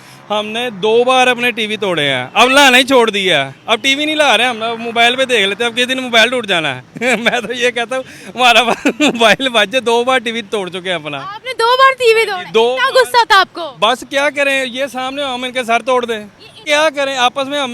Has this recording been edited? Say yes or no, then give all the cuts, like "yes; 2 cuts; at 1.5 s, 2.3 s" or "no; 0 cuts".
yes; 1 cut; at 16.5 s